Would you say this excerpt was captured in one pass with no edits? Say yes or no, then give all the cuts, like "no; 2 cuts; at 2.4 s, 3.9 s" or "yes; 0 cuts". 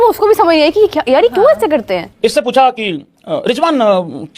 no; 1 cut; at 2.1 s